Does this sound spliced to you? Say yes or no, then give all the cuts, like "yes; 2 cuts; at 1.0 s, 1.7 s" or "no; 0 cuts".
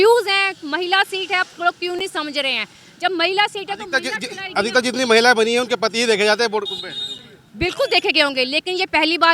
no; 0 cuts